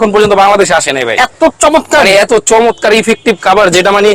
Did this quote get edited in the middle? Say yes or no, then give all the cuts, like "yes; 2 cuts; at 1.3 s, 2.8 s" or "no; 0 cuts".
no; 0 cuts